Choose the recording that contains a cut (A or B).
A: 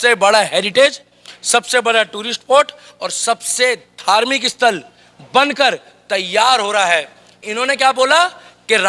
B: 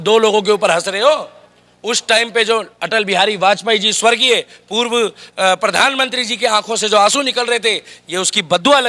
A